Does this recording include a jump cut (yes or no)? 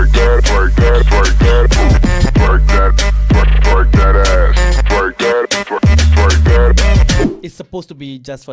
yes